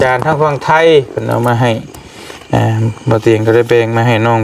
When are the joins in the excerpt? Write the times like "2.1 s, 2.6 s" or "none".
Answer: none